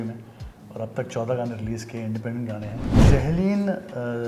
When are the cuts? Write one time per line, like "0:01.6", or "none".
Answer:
0:03.0